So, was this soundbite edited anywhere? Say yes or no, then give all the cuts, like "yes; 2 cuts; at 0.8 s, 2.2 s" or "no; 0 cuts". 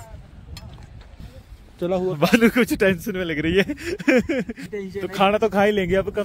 yes; 2 cuts; at 1.2 s, 4.7 s